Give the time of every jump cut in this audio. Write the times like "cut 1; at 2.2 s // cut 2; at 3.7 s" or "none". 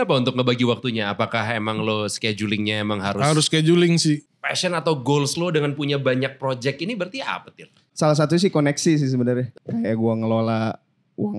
cut 1; at 4.3 s // cut 2; at 9.5 s